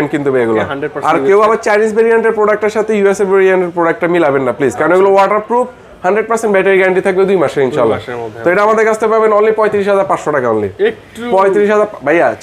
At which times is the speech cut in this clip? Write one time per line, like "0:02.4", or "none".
none